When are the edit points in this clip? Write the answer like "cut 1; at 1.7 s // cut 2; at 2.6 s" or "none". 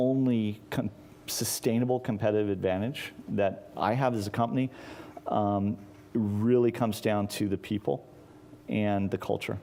none